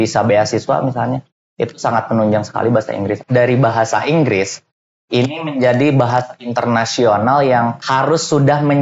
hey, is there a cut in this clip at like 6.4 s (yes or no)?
no